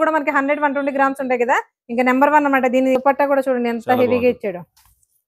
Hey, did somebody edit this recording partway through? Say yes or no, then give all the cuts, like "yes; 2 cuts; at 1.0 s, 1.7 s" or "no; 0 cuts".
yes; 1 cut; at 3.0 s